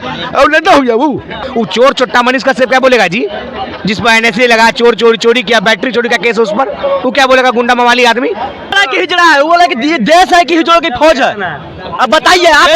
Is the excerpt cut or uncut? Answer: cut